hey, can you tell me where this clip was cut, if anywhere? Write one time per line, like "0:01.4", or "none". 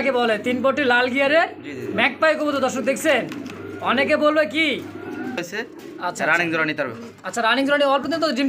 0:05.4